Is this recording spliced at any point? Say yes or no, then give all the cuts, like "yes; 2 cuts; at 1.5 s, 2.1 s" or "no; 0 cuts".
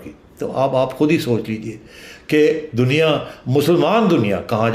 no; 0 cuts